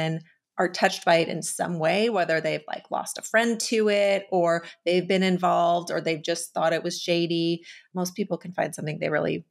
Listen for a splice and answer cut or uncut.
cut